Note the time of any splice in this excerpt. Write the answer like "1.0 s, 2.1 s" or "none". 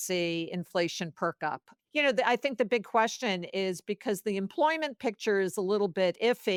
none